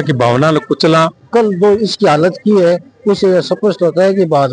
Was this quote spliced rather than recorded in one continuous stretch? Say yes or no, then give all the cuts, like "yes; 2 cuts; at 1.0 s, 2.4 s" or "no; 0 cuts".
yes; 1 cut; at 1.2 s